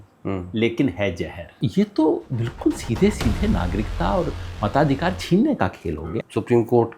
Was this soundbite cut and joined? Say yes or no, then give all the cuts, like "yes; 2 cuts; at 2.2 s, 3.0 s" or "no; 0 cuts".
yes; 2 cuts; at 1.6 s, 6.0 s